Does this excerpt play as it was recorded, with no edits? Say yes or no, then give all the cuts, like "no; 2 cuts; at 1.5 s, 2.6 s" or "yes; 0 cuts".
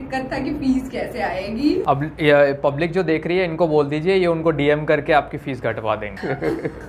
yes; 0 cuts